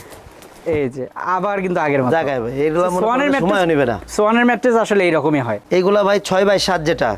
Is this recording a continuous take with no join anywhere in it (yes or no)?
yes